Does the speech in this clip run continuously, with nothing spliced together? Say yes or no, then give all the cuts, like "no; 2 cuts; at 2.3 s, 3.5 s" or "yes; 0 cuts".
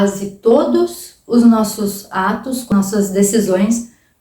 no; 1 cut; at 2.7 s